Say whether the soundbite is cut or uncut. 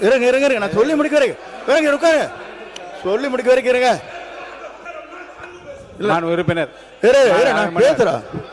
cut